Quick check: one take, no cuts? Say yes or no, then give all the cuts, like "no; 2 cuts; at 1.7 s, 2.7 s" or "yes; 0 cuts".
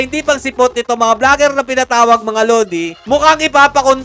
yes; 0 cuts